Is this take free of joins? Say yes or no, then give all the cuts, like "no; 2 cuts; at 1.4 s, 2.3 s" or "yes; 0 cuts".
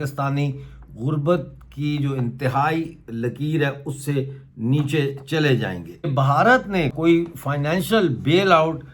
no; 2 cuts; at 6.1 s, 6.9 s